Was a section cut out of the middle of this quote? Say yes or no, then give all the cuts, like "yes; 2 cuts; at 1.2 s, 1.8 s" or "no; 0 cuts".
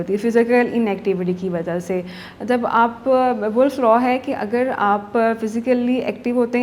no; 0 cuts